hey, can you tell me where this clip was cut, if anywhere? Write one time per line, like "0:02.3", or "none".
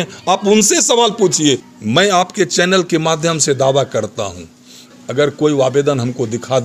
0:01.7
0:04.9